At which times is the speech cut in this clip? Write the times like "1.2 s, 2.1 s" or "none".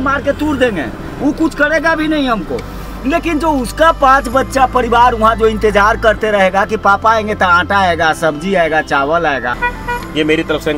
9.6 s